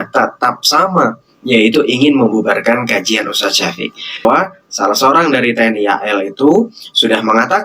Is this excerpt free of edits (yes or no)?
no